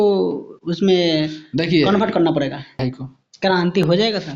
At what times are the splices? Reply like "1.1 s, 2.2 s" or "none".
2.8 s